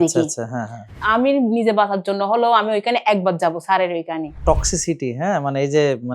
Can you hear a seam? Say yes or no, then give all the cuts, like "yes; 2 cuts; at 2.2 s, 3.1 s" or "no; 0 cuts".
yes; 2 cuts; at 1.0 s, 4.4 s